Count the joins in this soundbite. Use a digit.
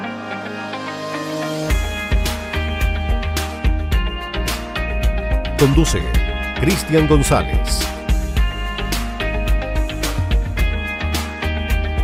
0